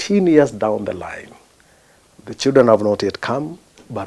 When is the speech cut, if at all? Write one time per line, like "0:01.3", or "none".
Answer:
none